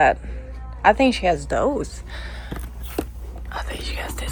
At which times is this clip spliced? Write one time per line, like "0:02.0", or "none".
none